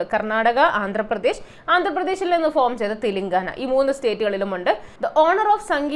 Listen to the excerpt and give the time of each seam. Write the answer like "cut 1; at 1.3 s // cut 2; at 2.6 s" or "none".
cut 1; at 4.9 s